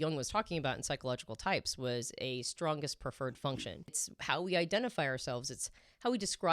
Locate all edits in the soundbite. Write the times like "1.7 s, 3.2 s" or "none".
3.9 s